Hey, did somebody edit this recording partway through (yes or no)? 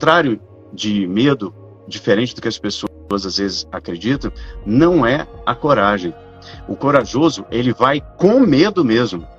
no